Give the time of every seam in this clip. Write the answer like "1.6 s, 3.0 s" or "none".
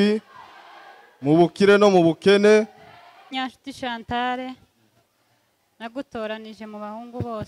3.4 s